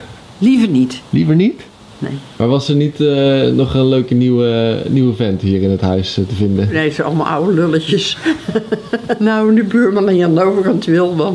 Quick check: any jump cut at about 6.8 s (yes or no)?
yes